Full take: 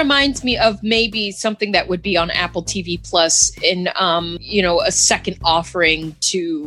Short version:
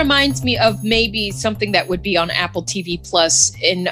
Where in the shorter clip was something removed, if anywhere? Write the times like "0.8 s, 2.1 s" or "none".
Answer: none